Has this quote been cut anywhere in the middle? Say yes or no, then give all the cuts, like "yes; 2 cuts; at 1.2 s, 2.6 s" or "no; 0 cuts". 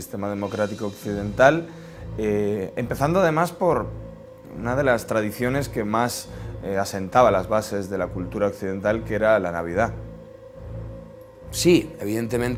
no; 0 cuts